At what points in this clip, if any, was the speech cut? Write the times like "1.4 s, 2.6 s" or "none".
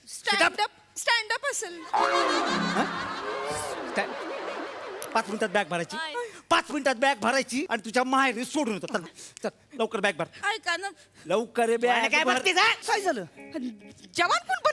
12.8 s

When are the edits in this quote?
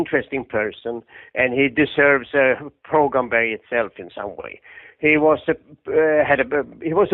2.0 s

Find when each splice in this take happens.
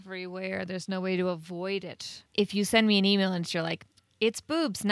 2.2 s

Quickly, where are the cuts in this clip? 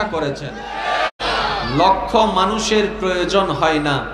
1.1 s

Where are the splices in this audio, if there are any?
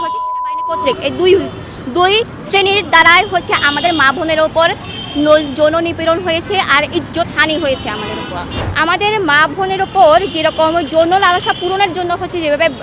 8.6 s

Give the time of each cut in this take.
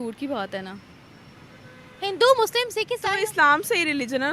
2.9 s

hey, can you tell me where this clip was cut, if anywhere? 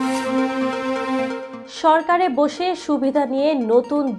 1.3 s

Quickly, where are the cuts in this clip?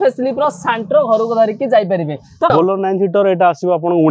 2.5 s

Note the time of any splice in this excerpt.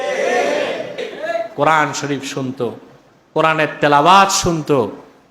1.0 s

